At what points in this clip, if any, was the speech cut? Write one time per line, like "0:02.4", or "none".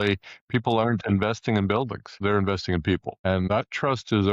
0:02.0
0:03.2